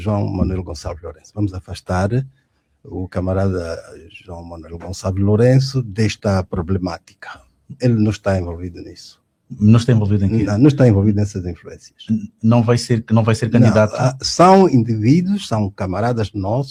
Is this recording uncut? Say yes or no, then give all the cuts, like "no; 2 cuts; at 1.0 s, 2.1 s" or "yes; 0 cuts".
yes; 0 cuts